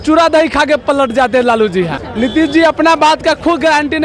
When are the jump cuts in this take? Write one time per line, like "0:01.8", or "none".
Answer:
0:02.0